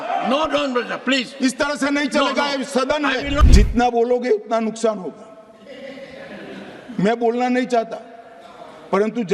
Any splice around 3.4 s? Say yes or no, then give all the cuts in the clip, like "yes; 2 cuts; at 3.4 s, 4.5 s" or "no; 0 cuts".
yes; 1 cut; at 3.4 s